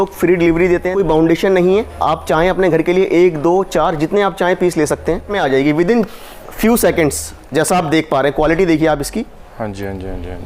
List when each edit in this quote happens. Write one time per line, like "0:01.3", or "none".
0:00.9
0:05.3